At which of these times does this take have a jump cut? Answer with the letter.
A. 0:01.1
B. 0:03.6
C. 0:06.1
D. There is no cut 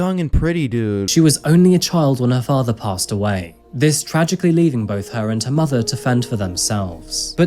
A